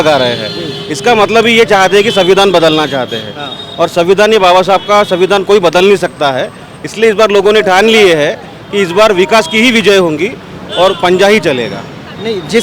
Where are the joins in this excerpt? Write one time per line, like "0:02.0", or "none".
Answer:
none

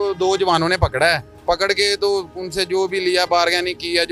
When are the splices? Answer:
none

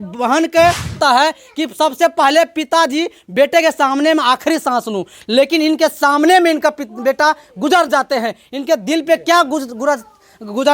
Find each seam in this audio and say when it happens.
0:01.0

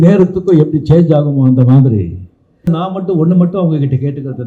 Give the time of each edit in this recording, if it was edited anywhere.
0:02.7

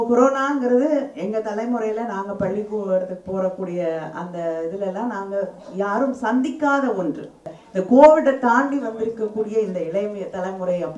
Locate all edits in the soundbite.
0:07.6

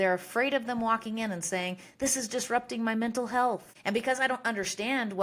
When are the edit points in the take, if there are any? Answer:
0:03.7

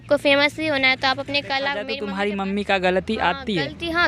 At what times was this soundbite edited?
0:01.9

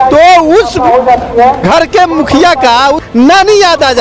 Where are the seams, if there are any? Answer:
0:03.0

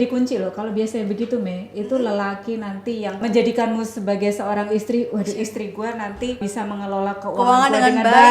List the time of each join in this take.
0:03.2
0:06.4

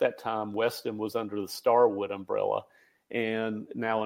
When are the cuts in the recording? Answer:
none

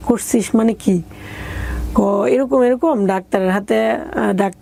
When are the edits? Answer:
none

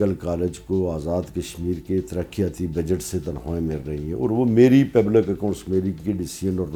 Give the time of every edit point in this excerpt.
none

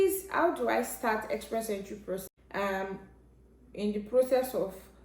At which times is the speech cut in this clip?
0:02.3

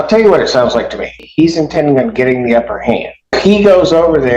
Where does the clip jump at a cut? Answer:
0:01.2
0:03.4

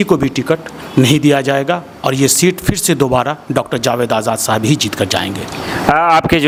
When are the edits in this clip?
none

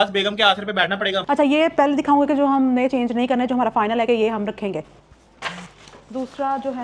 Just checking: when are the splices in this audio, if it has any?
0:01.2
0:04.8

